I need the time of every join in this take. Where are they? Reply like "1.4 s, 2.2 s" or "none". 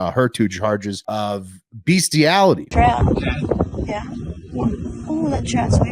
1.0 s, 2.7 s